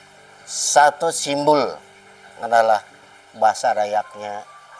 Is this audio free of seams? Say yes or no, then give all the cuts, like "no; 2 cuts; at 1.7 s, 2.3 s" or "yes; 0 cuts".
yes; 0 cuts